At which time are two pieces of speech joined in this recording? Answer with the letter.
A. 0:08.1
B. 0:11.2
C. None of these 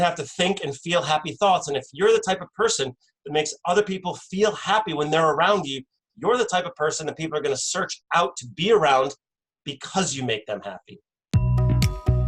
B